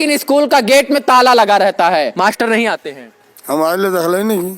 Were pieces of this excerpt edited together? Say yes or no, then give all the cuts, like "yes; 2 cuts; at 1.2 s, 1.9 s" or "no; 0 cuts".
yes; 1 cut; at 2.1 s